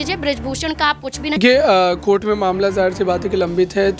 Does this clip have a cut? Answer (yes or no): yes